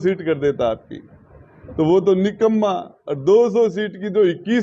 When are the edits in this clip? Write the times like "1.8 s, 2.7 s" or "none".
none